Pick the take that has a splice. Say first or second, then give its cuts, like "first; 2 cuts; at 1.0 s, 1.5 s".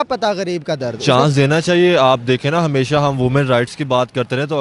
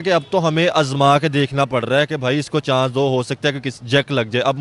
first; 1 cut; at 0.9 s